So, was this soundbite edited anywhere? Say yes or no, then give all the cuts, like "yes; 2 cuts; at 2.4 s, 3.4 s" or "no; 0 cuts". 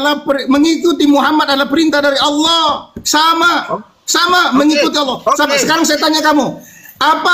yes; 1 cut; at 5.2 s